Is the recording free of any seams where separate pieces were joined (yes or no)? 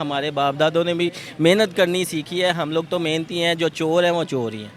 yes